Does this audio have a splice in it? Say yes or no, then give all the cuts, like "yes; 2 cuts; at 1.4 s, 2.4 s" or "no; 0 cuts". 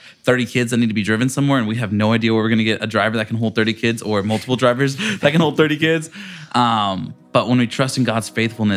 no; 0 cuts